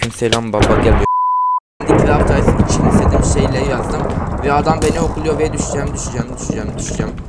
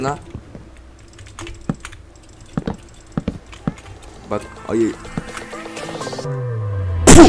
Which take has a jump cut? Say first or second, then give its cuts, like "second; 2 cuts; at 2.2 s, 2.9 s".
first; 1 cut; at 1.2 s